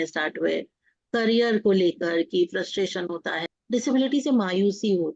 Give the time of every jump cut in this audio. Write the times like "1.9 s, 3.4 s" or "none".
3.4 s